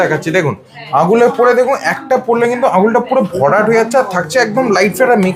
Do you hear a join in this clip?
no; 0 cuts

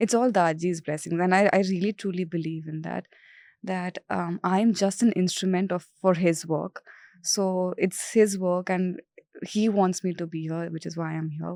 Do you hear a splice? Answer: no; 0 cuts

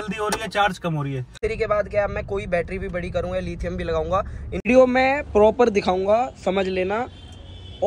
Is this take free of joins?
no; 2 cuts; at 1.4 s, 4.6 s

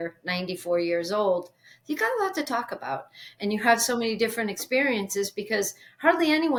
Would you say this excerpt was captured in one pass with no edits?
yes; 0 cuts

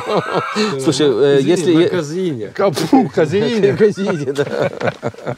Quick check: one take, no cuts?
yes; 0 cuts

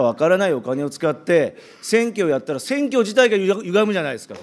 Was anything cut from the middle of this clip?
no; 0 cuts

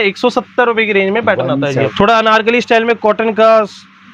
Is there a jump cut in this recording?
yes; 1 cut; at 1.9 s

